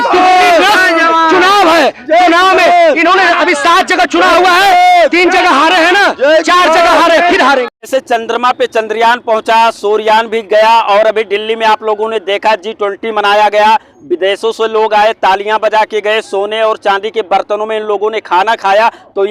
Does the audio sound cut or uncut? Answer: cut